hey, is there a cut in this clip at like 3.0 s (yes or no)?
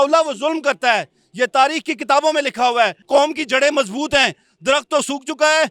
yes